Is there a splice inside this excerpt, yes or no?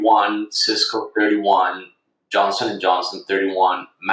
no